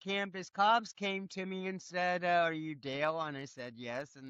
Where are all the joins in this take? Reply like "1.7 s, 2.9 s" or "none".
none